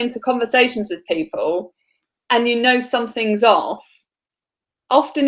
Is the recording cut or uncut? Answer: uncut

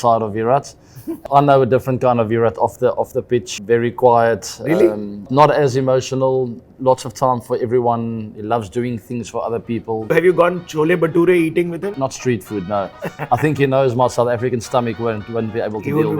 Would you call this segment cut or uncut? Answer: cut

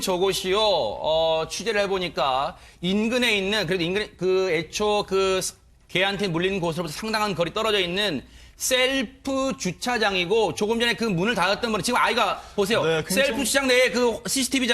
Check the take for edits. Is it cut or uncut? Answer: cut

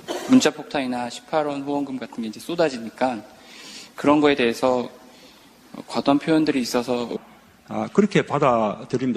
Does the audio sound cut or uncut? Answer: uncut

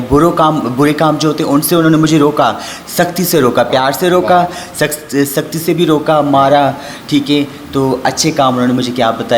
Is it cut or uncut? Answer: uncut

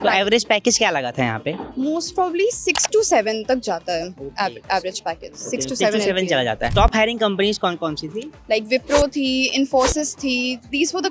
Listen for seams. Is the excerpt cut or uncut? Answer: uncut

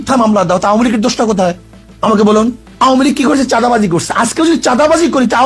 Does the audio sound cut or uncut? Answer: cut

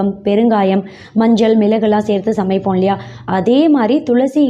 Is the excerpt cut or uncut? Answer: uncut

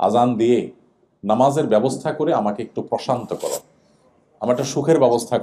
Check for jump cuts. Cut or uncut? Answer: uncut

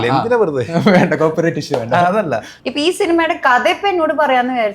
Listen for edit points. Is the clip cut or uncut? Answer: cut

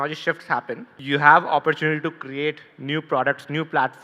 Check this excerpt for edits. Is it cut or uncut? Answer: cut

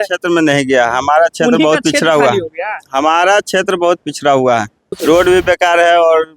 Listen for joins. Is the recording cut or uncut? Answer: cut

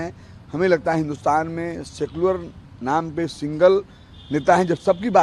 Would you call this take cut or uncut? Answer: uncut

